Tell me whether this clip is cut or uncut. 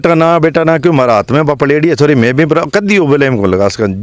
uncut